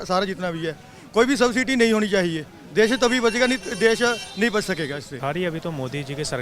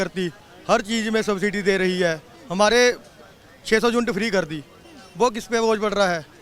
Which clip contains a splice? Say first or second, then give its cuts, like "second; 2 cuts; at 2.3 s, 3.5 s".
first; 1 cut; at 5.2 s